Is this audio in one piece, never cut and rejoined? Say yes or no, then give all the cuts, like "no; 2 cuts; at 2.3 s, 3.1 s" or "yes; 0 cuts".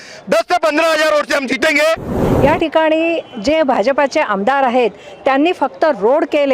no; 1 cut; at 2.2 s